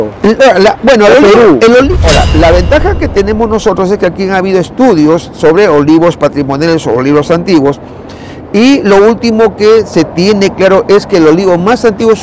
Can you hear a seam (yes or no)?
yes